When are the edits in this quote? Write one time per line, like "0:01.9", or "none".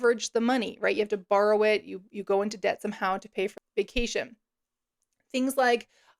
0:03.5